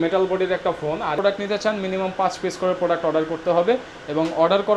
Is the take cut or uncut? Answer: cut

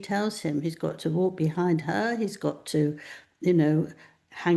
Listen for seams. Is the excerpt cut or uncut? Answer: uncut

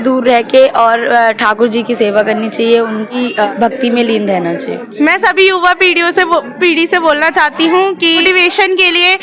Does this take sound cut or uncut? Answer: cut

